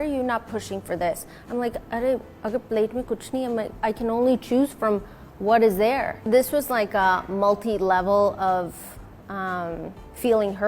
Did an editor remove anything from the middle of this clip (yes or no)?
yes